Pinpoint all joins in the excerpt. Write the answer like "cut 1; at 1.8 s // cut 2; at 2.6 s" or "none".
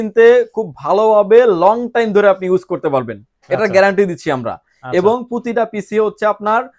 none